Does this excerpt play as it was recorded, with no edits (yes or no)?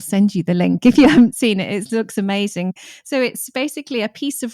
no